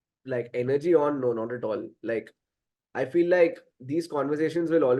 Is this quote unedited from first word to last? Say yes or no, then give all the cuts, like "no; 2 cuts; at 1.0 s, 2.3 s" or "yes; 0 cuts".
yes; 0 cuts